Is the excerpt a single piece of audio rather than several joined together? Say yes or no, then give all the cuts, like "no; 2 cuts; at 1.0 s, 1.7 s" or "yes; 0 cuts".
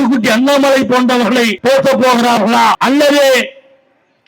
no; 2 cuts; at 1.5 s, 2.8 s